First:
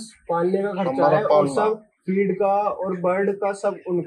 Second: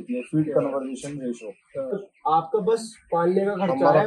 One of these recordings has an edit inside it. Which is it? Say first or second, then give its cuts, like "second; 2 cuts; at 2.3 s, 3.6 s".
second; 1 cut; at 1.9 s